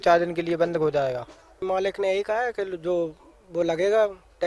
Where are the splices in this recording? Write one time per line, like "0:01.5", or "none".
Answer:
0:01.6